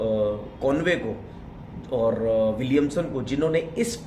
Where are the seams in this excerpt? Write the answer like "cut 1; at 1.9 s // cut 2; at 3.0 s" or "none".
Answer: none

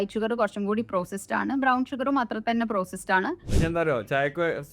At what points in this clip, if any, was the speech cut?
cut 1; at 3.5 s

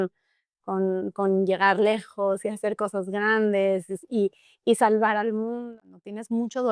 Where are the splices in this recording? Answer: cut 1; at 5.6 s

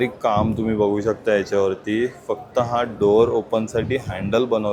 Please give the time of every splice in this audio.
none

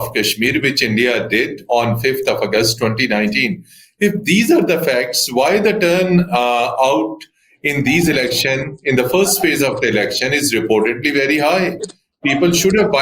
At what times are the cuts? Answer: none

